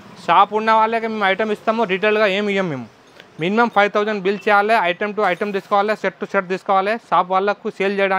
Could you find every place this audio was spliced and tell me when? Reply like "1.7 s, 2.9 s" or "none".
none